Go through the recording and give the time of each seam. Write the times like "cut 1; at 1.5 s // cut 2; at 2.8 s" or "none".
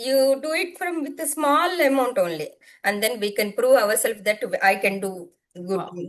cut 1; at 2.6 s